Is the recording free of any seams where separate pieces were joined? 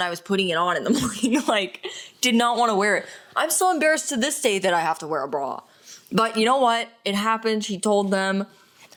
yes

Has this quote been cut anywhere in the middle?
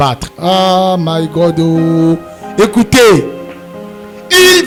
no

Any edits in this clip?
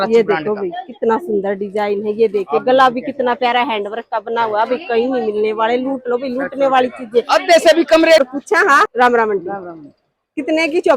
yes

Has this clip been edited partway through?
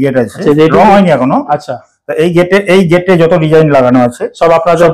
no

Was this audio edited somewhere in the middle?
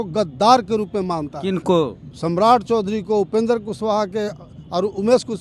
yes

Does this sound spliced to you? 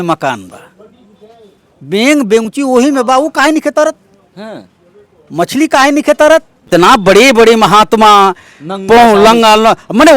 yes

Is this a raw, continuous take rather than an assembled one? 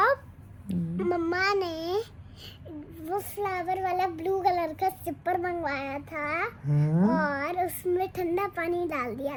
yes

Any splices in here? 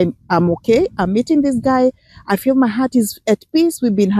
no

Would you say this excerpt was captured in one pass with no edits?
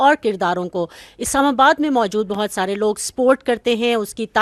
yes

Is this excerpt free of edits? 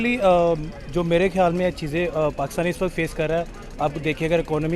yes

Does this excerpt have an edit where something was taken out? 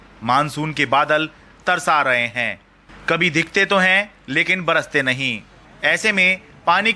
no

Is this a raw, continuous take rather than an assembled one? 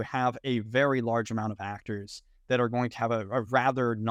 yes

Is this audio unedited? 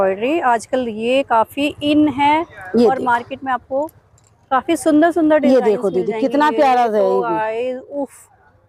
yes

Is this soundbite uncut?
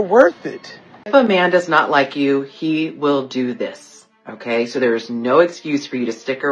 no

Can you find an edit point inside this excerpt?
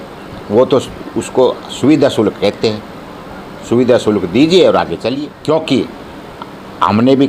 yes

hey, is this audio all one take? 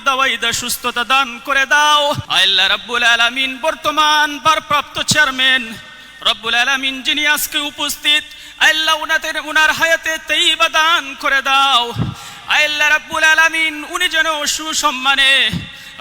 no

